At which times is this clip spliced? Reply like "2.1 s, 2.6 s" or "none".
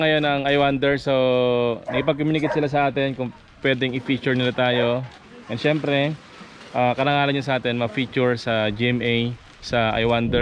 none